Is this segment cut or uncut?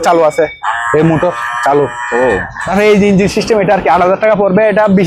cut